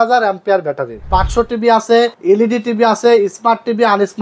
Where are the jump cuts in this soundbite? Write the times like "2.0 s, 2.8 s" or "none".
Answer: 1.1 s, 2.2 s